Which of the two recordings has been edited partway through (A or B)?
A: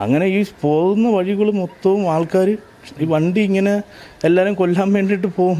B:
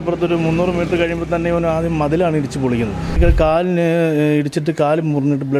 B